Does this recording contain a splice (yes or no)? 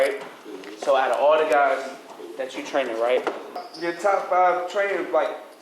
yes